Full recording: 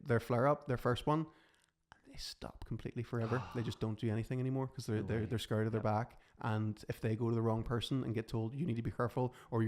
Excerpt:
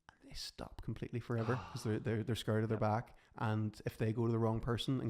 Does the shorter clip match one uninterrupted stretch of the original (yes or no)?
no